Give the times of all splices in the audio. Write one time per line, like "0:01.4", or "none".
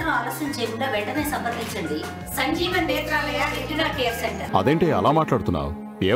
0:04.4